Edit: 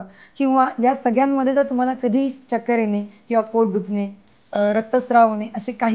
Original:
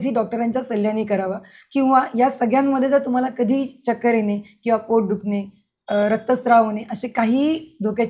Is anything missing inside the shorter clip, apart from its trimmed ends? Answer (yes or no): no